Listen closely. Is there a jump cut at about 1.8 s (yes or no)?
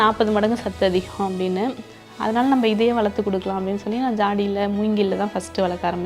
no